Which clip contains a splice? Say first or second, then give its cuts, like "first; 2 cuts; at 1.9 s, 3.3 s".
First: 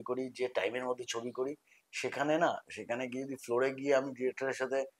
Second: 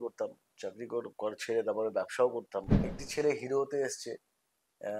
second; 1 cut; at 2.9 s